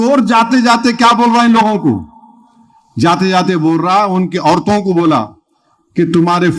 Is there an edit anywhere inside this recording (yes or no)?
no